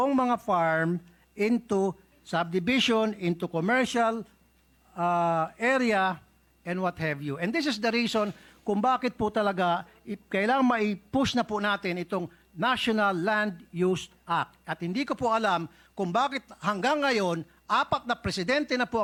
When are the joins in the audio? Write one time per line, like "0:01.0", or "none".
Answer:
none